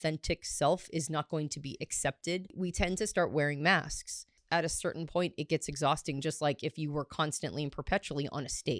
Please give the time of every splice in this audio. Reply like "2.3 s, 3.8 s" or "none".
2.5 s, 4.3 s